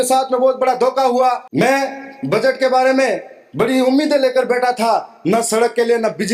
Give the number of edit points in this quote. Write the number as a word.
one